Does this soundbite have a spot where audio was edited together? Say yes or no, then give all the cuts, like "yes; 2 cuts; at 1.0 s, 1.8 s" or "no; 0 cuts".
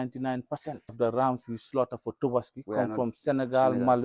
yes; 1 cut; at 0.9 s